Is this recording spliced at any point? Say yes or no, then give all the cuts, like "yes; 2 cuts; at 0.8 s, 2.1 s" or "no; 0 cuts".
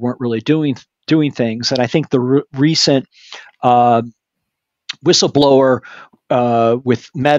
no; 0 cuts